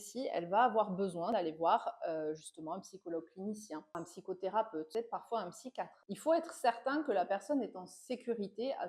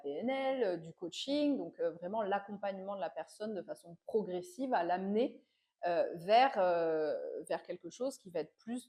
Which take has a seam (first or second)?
first